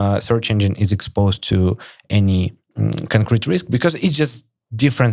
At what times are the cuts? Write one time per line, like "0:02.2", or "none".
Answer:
none